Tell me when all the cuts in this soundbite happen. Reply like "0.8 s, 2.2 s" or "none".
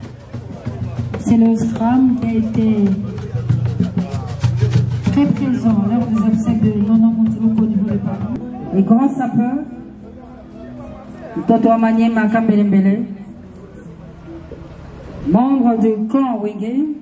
8.5 s